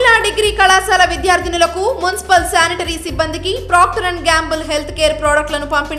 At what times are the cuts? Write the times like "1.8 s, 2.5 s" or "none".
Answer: none